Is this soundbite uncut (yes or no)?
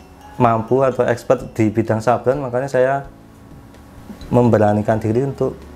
yes